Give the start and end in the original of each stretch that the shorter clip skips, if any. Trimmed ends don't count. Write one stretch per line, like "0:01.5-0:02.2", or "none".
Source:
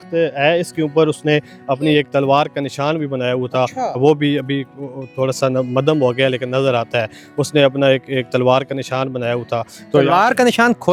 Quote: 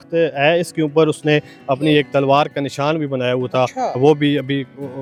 none